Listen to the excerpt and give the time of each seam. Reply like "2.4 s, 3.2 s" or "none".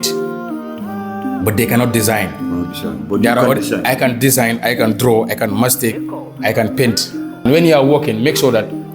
7.4 s